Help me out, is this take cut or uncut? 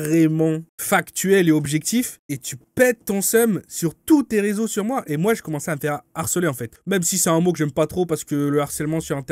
uncut